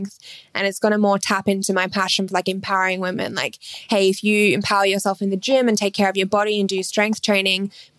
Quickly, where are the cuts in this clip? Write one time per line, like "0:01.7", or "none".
none